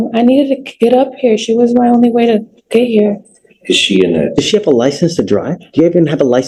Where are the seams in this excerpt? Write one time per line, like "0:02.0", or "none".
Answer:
none